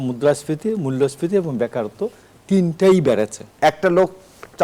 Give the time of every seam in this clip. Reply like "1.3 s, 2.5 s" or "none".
3.5 s